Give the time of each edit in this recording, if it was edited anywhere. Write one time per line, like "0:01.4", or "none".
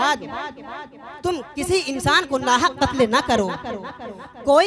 none